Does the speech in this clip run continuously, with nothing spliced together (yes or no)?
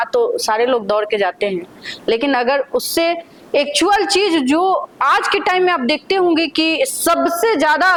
yes